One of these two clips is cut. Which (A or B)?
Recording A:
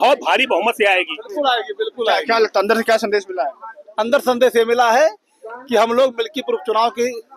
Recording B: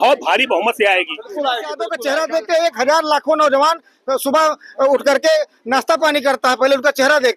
B